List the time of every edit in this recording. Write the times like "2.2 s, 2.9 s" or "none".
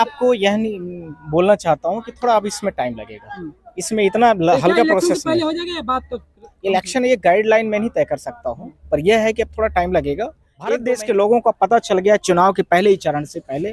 10.8 s